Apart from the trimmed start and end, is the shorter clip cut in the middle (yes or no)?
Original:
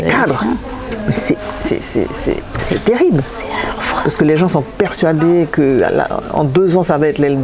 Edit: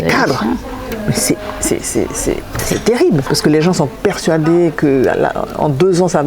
yes